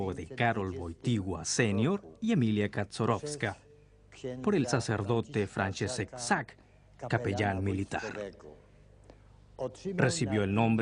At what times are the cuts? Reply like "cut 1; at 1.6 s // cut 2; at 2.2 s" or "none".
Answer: none